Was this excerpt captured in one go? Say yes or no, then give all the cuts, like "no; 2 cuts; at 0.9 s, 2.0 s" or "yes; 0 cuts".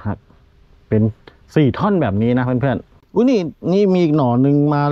no; 1 cut; at 2.9 s